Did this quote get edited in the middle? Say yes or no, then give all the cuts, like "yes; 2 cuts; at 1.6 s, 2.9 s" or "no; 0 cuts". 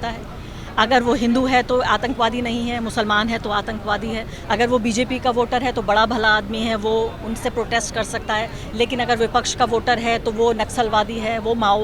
no; 0 cuts